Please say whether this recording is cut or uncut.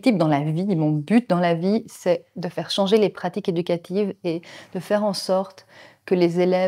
uncut